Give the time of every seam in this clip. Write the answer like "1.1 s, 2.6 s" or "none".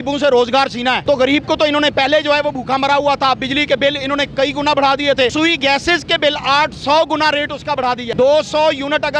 1.0 s, 5.3 s, 8.1 s